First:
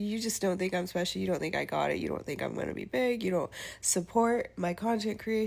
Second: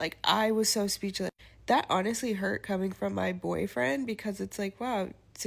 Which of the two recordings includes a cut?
first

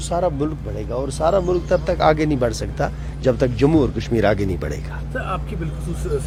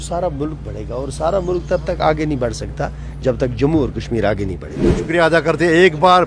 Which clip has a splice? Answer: second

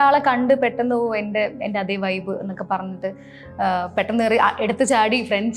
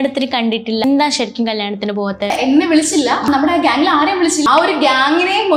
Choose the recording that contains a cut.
second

